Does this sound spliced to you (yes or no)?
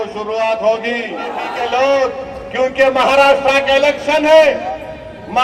yes